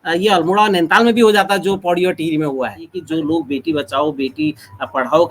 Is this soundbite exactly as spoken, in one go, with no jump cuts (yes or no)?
no